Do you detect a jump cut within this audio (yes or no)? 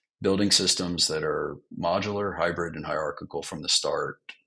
no